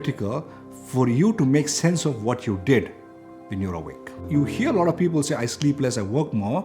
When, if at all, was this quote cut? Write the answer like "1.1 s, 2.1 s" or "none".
4.2 s